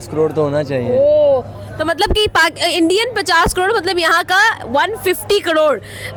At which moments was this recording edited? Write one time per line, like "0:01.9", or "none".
none